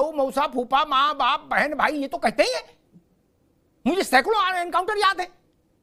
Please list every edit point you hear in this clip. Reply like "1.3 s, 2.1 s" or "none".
none